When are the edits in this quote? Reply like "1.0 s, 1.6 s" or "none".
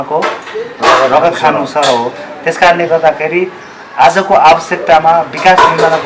none